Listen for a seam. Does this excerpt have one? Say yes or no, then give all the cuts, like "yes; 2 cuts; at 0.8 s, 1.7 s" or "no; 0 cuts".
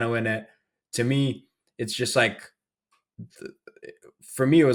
no; 0 cuts